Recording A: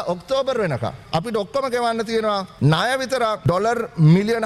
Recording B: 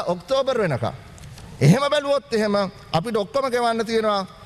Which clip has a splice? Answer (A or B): A